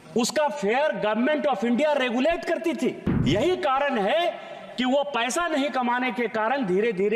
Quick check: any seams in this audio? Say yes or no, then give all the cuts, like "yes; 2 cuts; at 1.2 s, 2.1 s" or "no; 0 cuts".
yes; 1 cut; at 3.1 s